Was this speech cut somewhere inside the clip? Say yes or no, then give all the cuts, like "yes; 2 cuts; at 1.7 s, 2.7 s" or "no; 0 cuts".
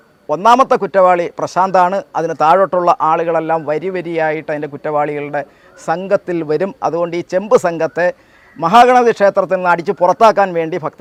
no; 0 cuts